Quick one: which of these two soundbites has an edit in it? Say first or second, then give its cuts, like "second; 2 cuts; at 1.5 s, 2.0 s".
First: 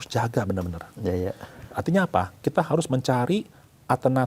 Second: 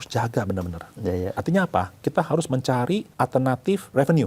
second; 2 cuts; at 1.4 s, 3.3 s